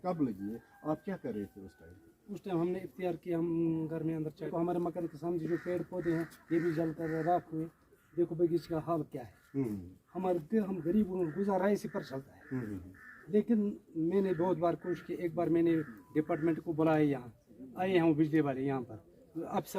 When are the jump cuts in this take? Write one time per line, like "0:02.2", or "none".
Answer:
0:04.5